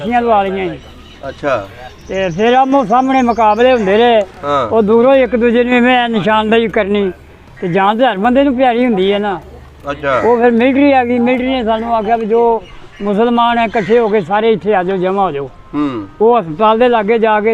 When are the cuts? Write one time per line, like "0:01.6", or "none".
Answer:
none